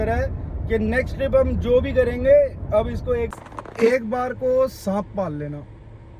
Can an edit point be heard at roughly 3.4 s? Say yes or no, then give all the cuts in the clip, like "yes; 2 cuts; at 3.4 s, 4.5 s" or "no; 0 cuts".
yes; 1 cut; at 3.4 s